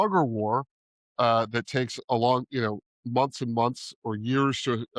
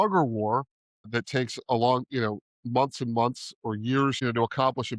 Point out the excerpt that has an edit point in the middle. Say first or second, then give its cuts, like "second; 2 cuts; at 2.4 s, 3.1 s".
second; 2 cuts; at 1.1 s, 4.2 s